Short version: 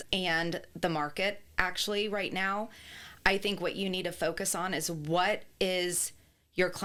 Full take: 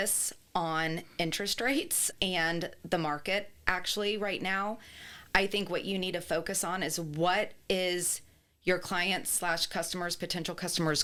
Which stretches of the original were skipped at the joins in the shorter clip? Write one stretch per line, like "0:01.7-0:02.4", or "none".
none

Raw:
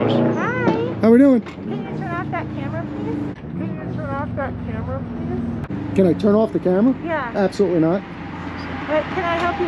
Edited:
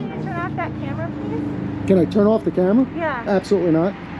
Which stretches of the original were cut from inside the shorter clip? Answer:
0:03.3-0:05.7

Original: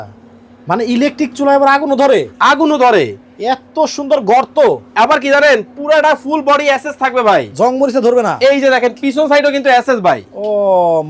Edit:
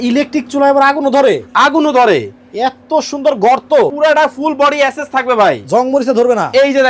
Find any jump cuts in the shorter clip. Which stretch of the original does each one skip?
0:04.8-0:05.8

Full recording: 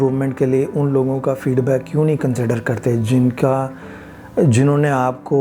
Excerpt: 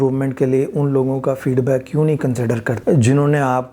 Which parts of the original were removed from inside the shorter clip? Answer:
0:02.7-0:04.2

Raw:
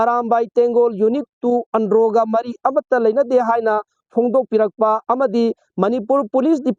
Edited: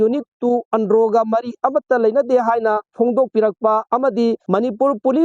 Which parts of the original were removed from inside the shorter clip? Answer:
0:03.9-0:04.0
0:05.6-0:05.7

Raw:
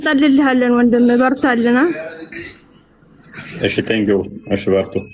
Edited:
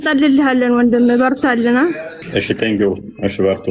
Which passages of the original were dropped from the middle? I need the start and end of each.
0:02.1-0:03.4

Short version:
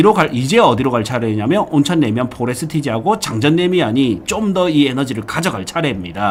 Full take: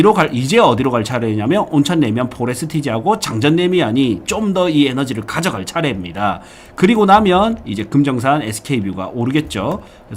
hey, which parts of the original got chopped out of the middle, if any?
none

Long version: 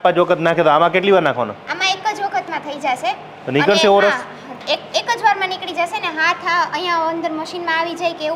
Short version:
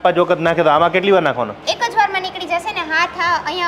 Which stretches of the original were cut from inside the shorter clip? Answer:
0:01.6-0:04.8

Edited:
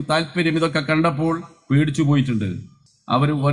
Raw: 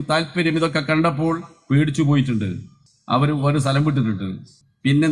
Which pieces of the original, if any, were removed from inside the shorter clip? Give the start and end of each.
none

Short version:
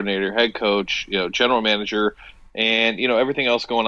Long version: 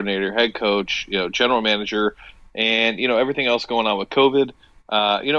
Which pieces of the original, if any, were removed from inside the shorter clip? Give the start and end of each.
none

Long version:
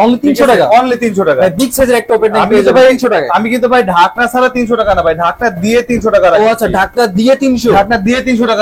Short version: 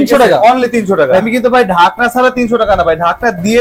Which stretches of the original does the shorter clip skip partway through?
0:01.5-0:03.4

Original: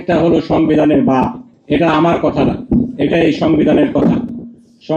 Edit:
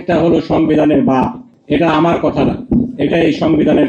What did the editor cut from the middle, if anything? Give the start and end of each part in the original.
none

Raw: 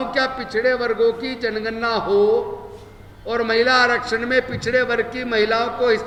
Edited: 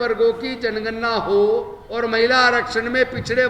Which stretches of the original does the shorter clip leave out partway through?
0:02.6-0:03.2

